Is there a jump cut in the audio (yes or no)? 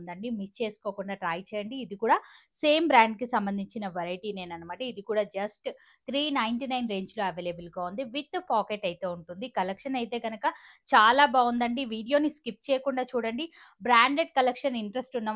no